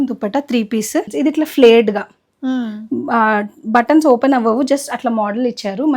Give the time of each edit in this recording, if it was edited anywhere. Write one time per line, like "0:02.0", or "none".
0:01.1